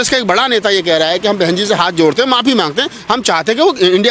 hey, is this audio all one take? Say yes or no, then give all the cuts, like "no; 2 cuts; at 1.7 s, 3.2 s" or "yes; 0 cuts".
yes; 0 cuts